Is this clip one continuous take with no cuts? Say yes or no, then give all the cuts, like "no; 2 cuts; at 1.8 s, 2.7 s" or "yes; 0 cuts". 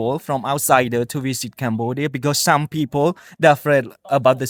yes; 0 cuts